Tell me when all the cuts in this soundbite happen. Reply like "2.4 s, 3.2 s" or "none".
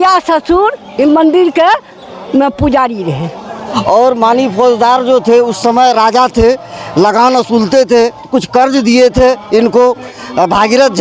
3.5 s